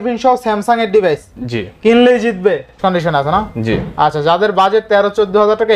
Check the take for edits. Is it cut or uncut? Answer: cut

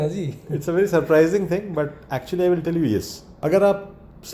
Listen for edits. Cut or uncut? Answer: cut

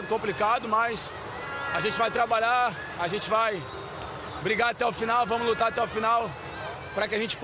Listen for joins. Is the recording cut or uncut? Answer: uncut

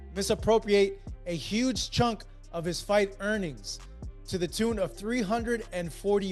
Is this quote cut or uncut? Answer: uncut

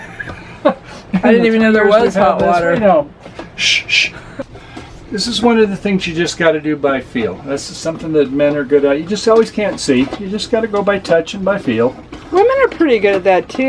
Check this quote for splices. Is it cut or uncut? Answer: cut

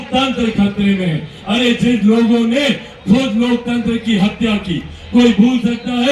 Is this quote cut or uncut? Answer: uncut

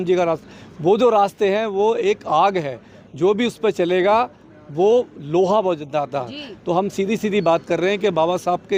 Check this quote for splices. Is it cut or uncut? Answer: uncut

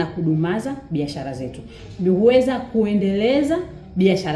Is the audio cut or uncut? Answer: uncut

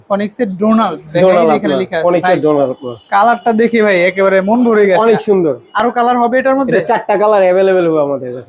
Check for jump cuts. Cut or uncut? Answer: uncut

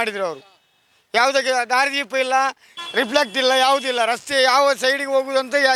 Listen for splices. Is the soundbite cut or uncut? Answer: uncut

